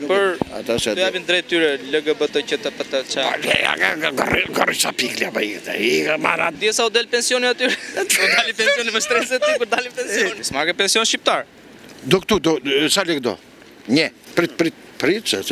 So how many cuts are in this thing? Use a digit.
3